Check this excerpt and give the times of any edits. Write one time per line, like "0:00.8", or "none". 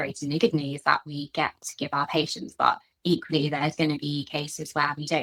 none